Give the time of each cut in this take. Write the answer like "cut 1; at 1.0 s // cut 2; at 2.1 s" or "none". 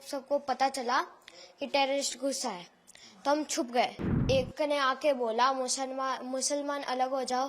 cut 1; at 4.2 s